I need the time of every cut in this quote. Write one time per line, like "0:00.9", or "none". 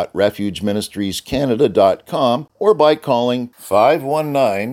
0:02.5